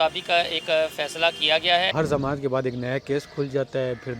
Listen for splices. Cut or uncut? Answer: cut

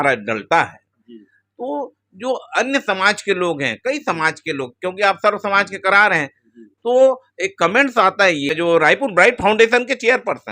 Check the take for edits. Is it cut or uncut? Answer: cut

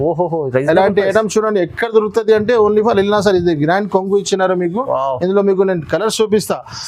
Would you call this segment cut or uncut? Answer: uncut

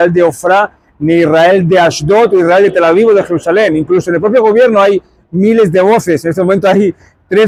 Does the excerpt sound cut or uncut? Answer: uncut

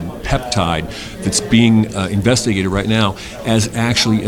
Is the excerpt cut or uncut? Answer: uncut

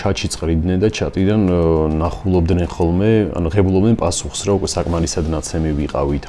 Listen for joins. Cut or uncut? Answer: uncut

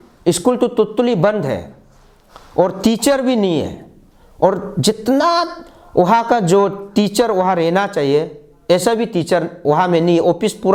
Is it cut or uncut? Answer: uncut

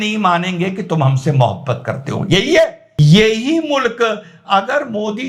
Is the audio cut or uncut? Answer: cut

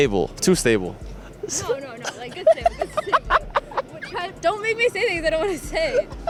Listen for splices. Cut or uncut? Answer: uncut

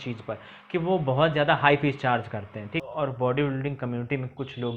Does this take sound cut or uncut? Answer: cut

